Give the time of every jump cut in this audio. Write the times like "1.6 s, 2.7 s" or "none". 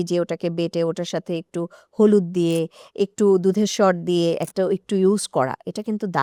none